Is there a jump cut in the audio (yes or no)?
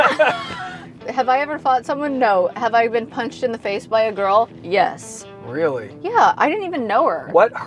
yes